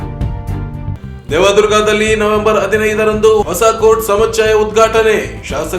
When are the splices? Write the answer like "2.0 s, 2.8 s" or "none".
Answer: 0.9 s